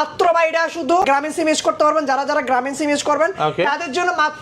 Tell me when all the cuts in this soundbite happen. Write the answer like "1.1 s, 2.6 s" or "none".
1.0 s